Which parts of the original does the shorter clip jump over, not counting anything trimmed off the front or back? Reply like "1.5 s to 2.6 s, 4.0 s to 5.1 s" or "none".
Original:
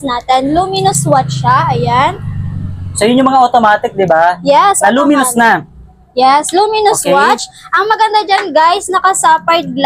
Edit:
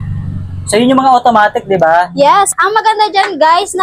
4.8 s to 7.6 s